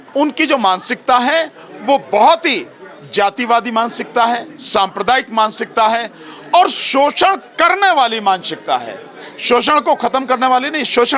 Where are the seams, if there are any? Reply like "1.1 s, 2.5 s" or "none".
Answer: none